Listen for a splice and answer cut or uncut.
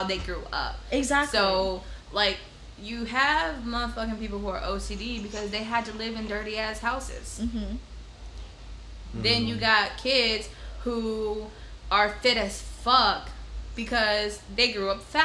uncut